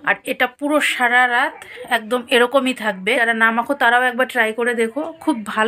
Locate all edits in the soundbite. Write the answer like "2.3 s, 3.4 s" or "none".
3.2 s